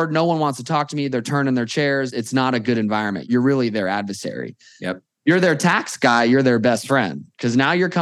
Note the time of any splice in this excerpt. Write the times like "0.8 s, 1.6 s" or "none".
2.1 s, 3.2 s